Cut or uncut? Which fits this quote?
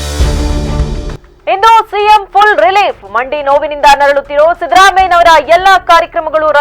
cut